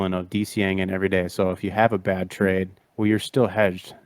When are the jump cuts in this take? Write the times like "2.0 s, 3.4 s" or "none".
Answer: 2.8 s